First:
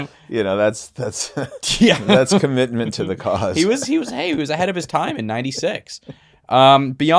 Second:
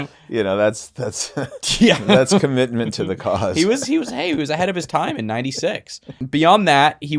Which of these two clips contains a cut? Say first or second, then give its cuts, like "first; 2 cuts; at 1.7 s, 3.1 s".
second; 1 cut; at 6.2 s